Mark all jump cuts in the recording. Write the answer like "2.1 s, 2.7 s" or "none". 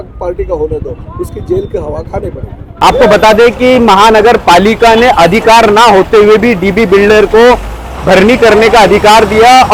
none